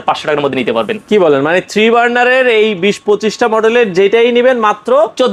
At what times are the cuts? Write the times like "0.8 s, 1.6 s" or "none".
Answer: none